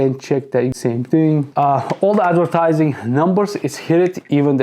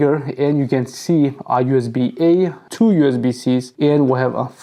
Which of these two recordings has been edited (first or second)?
first